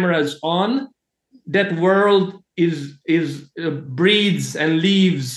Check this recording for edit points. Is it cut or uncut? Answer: uncut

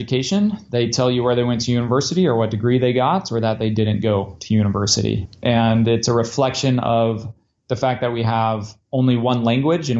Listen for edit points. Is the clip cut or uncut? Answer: cut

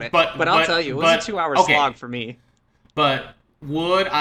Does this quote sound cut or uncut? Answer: uncut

